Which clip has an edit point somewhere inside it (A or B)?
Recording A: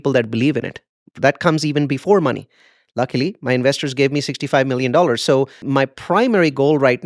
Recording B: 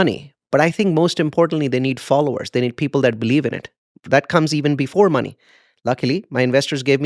A